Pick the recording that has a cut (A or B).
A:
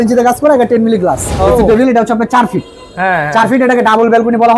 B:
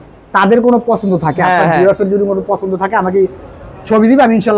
A